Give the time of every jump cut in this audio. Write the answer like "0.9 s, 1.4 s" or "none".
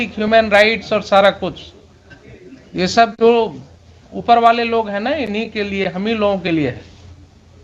none